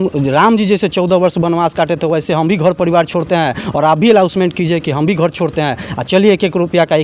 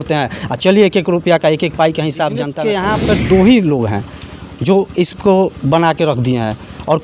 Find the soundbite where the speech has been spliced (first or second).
second